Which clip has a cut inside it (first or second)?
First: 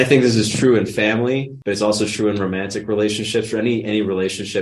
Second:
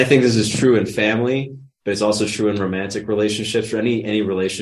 first